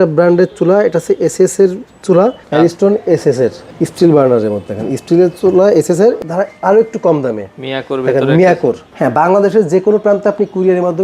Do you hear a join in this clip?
yes; 4 cuts; at 2.4 s, 3.6 s, 6.2 s, 8.9 s

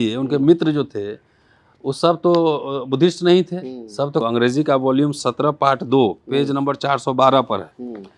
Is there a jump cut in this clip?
yes; 1 cut; at 4.2 s

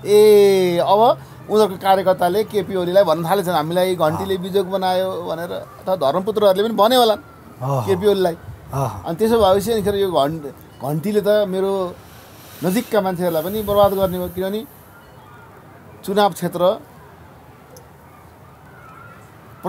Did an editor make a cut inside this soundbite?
no; 0 cuts

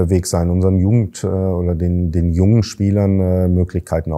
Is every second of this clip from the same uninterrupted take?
yes; 0 cuts

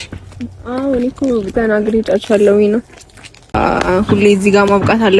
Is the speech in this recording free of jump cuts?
no; 1 cut; at 3.5 s

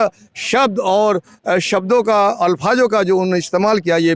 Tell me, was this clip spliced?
no; 0 cuts

